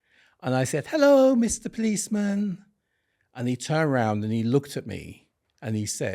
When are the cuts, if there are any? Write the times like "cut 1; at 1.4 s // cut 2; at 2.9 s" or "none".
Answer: none